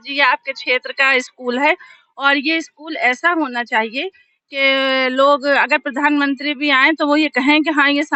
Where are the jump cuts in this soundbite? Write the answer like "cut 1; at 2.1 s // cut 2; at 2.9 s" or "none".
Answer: none